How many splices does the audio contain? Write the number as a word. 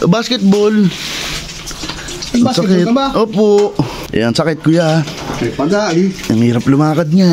zero